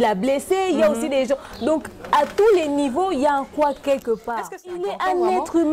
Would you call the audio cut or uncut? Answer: cut